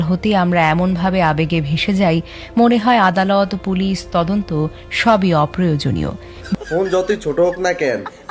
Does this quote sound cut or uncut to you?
cut